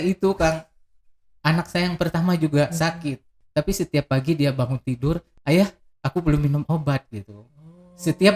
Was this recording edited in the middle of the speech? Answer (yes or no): yes